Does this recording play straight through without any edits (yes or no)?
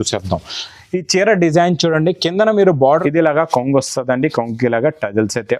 no